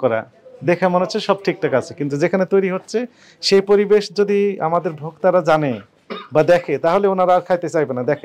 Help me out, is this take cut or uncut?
uncut